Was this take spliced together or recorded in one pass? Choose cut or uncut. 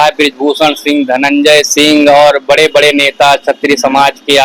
uncut